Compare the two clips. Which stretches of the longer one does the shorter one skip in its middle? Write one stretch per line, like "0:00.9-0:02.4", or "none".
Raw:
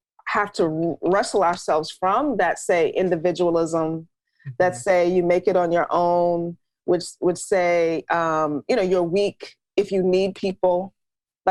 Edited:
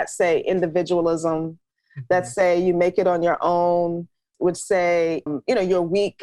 0:06.8-0:07.1
0:08.1-0:08.5